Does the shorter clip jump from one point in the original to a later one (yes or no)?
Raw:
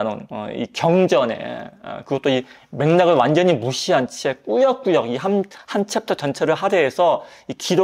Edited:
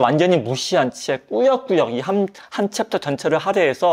no